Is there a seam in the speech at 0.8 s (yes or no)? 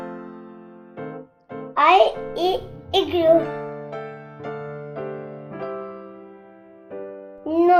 no